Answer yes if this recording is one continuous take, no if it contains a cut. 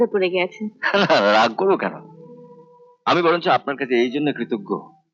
yes